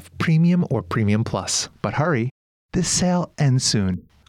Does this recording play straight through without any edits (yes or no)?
yes